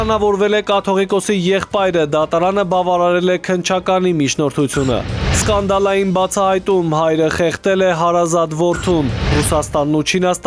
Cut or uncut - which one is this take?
uncut